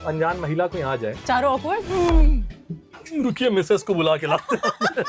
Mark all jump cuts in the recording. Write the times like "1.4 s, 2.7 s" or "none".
none